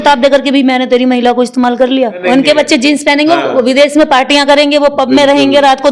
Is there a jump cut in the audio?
yes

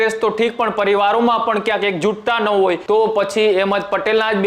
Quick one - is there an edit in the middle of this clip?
yes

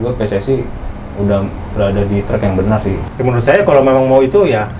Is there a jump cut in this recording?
yes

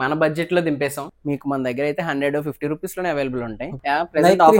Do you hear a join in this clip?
yes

